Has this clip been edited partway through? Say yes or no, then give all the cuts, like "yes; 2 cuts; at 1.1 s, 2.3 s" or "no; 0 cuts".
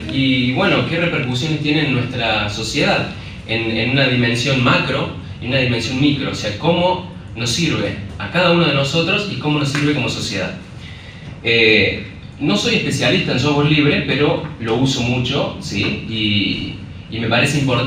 no; 0 cuts